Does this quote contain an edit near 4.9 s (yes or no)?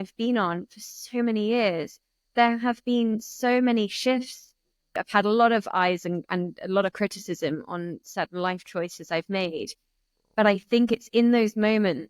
yes